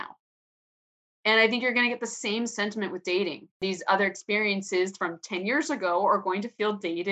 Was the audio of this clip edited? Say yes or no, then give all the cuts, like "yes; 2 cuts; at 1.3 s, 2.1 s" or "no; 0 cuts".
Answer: yes; 1 cut; at 3.6 s